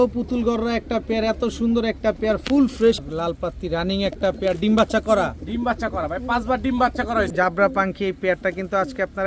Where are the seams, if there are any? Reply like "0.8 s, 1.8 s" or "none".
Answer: 3.0 s, 7.3 s